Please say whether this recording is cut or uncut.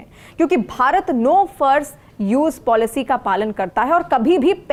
uncut